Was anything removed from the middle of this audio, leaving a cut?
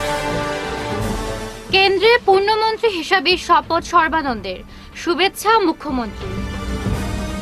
no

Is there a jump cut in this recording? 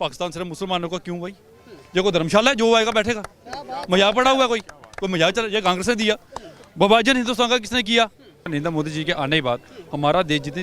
yes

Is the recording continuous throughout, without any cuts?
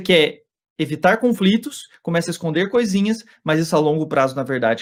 yes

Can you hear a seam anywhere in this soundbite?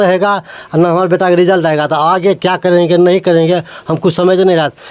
no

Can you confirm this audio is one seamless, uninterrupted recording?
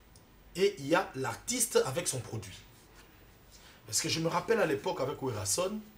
yes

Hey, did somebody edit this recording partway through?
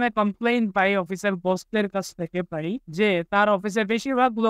yes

